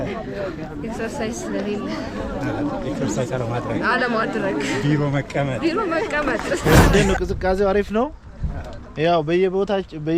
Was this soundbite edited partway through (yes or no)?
yes